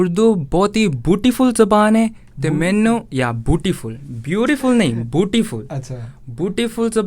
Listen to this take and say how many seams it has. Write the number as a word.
zero